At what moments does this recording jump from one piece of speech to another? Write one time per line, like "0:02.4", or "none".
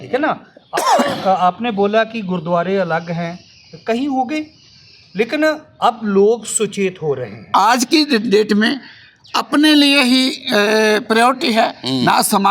0:07.5